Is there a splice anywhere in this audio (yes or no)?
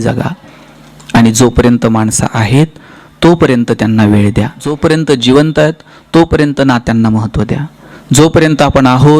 yes